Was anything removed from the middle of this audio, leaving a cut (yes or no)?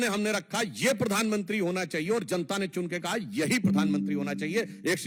no